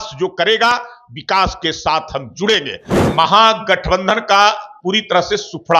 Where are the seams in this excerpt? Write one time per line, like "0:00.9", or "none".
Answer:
0:02.8